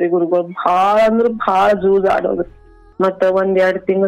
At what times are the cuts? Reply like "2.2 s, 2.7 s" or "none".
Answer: 2.8 s